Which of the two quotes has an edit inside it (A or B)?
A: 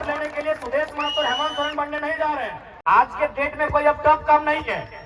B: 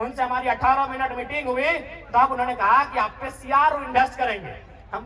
A